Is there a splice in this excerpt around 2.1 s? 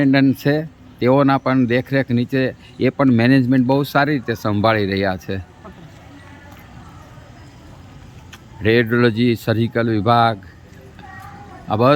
no; 0 cuts

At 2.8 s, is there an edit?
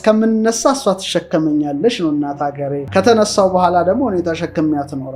yes; 1 cut; at 2.8 s

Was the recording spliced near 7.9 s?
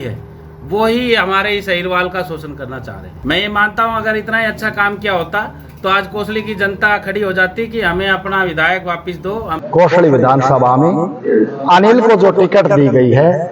no; 2 cuts; at 3.1 s, 9.5 s

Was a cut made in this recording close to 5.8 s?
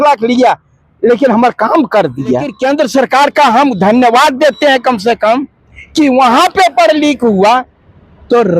no; 1 cut; at 2.5 s

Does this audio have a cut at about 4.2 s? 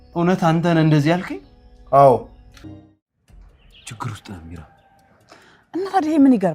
no; 1 cut; at 2.7 s

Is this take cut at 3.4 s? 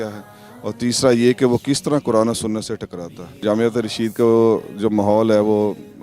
yes; 1 cut; at 3.4 s

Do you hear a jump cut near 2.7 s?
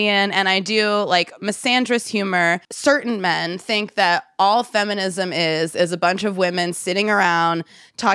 yes; 1 cut; at 2.7 s

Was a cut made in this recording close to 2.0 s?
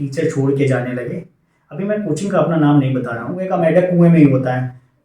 no; 1 cut; at 3.4 s

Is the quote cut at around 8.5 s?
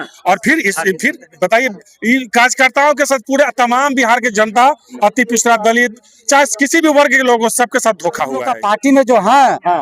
yes; 1 cut; at 8.5 s

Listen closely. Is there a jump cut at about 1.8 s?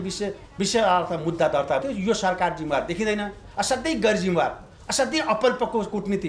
yes; 1 cut; at 1.8 s

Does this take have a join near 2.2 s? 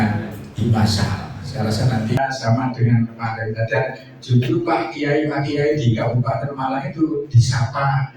yes; 1 cut; at 2.2 s

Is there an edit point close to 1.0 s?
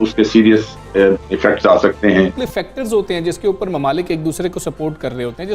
no; 1 cut; at 2.5 s

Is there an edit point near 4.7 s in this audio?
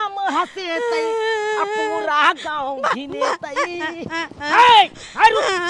no; 0 cuts

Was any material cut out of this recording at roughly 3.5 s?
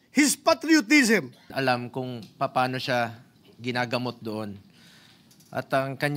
no; 1 cut; at 1.5 s

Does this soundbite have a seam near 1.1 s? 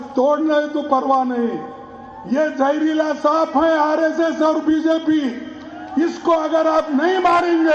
yes; 1 cut; at 1.1 s

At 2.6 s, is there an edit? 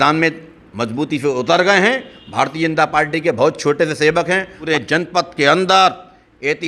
no; 1 cut; at 4.6 s

